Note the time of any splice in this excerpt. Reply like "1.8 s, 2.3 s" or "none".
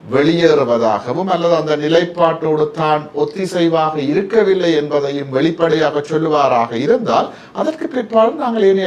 none